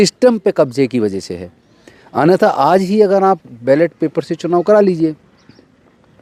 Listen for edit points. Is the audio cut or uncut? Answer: uncut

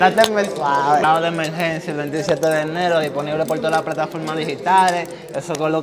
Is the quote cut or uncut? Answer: cut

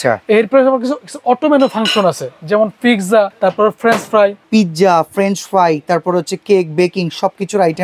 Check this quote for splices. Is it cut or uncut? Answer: cut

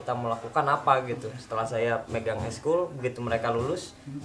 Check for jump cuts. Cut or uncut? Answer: uncut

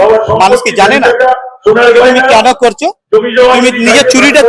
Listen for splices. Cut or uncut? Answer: uncut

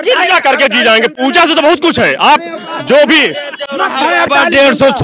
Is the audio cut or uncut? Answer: uncut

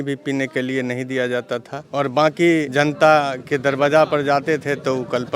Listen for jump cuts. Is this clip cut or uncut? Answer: cut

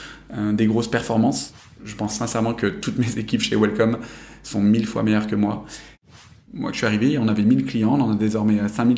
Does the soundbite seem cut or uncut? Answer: cut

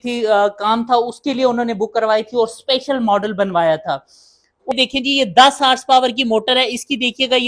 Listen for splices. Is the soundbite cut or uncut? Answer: cut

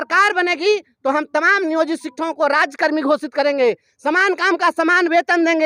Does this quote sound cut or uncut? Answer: uncut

